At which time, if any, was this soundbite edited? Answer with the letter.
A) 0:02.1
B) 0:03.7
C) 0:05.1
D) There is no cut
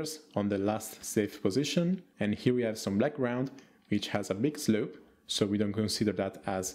A